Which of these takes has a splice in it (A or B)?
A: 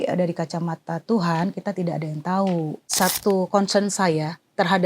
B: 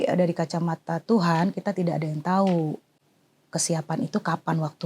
A